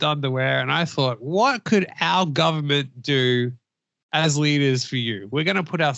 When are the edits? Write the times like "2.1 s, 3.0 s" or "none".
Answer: none